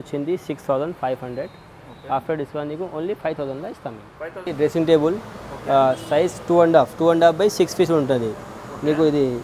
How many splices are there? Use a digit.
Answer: 1